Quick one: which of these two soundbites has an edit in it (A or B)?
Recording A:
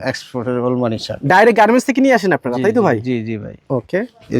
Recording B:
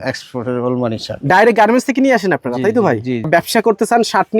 B